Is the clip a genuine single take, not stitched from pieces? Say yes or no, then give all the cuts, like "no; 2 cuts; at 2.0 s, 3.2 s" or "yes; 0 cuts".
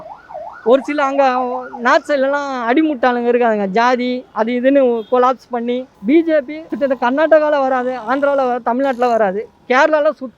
no; 2 cuts; at 5.9 s, 6.6 s